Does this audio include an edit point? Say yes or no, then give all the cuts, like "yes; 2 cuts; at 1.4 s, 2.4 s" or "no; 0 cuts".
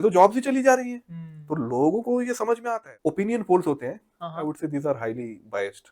yes; 1 cut; at 2.9 s